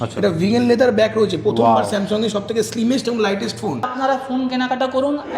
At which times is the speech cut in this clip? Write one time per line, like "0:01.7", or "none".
0:03.9